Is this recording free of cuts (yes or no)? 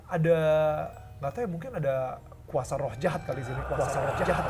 yes